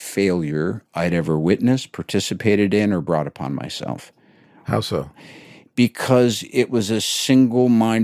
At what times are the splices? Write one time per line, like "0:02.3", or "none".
none